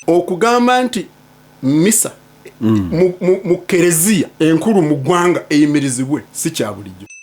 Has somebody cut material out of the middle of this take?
yes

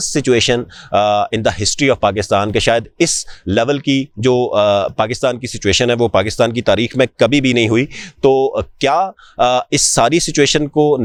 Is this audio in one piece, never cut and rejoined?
yes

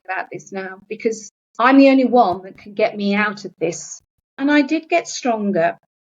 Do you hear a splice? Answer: yes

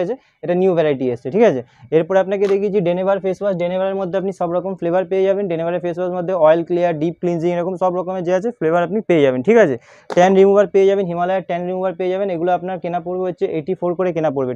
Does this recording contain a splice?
no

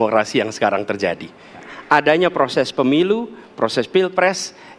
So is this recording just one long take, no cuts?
no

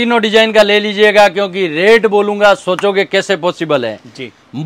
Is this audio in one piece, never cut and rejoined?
yes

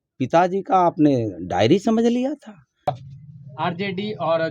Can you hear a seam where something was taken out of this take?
yes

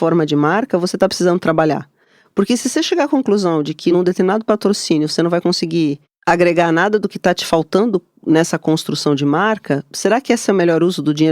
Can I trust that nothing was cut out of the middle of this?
no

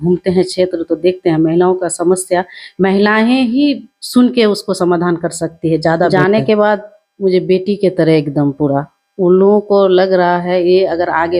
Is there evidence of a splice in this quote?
yes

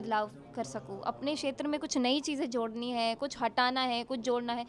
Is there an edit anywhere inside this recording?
no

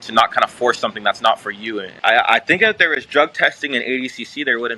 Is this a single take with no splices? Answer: no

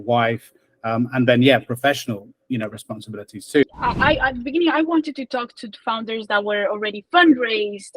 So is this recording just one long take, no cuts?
no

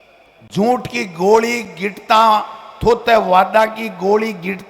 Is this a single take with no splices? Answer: yes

